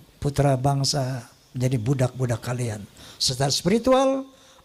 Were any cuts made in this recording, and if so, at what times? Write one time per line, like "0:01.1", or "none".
none